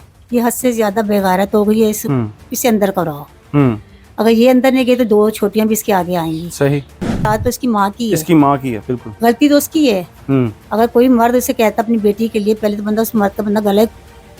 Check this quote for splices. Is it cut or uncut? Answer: cut